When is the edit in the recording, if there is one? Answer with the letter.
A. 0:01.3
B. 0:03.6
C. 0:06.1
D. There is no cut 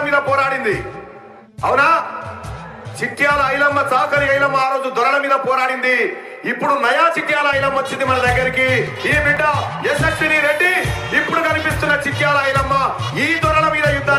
D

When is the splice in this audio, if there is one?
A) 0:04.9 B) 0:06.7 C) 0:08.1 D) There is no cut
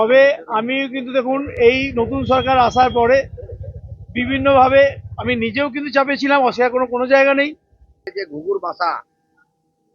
C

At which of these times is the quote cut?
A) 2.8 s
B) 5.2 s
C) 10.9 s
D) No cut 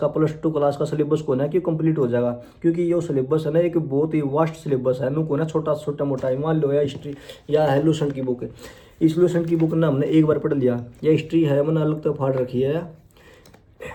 D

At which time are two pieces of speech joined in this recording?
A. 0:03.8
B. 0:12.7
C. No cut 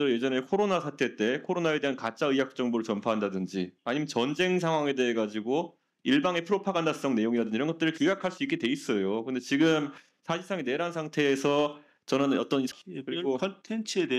B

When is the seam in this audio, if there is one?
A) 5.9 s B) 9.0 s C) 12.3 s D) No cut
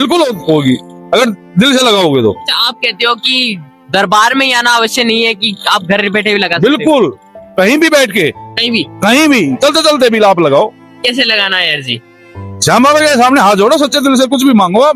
D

